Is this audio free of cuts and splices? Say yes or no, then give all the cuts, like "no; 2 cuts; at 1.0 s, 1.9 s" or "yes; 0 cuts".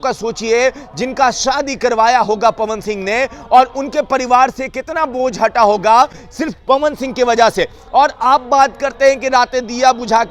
yes; 0 cuts